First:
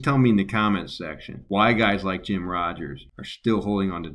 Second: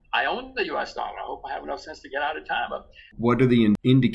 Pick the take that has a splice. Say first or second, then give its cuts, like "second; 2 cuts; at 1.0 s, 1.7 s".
second; 1 cut; at 3.1 s